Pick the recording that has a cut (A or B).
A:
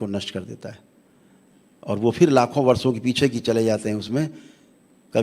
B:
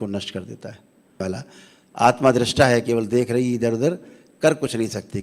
B